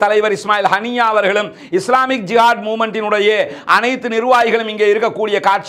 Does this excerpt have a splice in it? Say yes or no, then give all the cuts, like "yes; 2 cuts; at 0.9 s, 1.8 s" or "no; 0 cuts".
no; 0 cuts